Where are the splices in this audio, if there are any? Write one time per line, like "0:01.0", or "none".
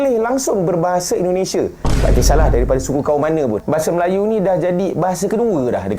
0:03.6